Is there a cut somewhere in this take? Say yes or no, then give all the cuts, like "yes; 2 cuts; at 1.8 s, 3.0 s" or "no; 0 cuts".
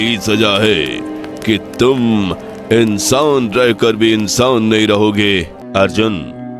yes; 1 cut; at 5.6 s